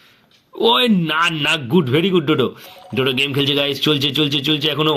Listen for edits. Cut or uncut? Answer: uncut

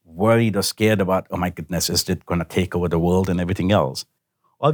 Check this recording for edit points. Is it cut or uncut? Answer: uncut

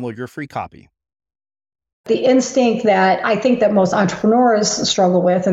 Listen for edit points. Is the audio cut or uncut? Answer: cut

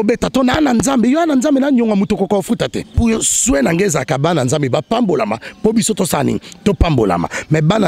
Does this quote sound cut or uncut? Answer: cut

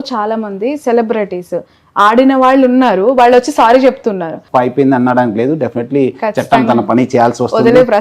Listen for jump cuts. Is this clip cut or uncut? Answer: cut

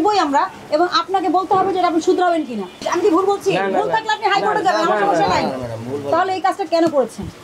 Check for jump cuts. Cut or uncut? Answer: cut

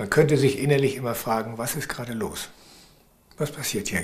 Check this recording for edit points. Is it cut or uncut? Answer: uncut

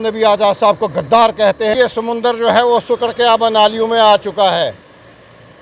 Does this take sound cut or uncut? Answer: cut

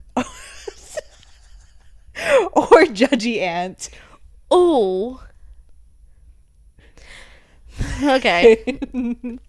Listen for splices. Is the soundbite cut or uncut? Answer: uncut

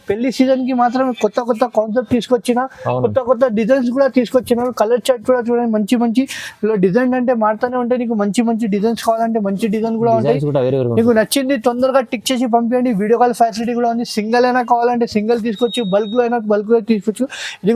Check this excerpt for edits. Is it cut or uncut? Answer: uncut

